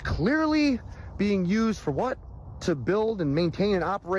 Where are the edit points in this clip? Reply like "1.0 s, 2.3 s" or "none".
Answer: none